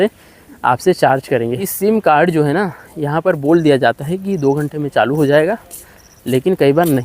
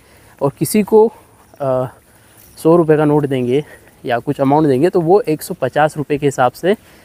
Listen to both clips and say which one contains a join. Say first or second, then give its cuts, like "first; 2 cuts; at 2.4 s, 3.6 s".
first; 1 cut; at 1.7 s